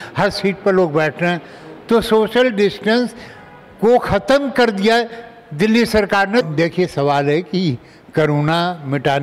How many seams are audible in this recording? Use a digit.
1